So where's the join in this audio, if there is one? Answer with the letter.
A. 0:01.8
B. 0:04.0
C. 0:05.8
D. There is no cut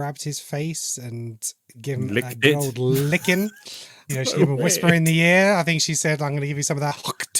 B